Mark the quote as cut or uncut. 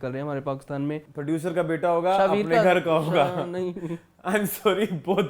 cut